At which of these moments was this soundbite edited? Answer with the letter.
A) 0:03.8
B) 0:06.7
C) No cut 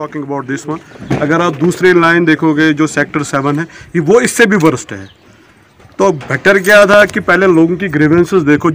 C